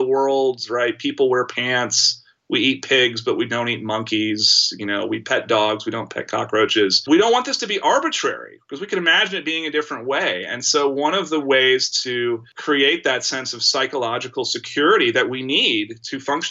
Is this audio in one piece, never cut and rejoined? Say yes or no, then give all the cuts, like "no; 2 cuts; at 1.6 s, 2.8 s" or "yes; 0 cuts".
yes; 0 cuts